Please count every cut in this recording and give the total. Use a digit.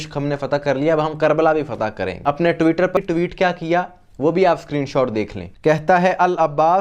2